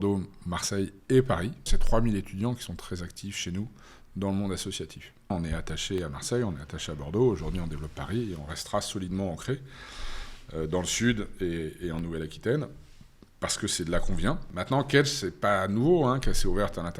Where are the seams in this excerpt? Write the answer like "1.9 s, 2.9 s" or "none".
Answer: 1.7 s, 5.3 s, 14.5 s